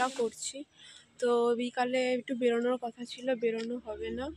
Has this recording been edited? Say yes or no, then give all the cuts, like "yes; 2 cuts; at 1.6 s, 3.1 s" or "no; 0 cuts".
no; 0 cuts